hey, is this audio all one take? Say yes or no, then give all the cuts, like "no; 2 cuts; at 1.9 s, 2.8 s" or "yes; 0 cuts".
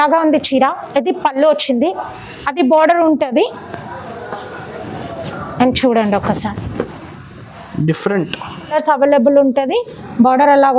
no; 1 cut; at 8.7 s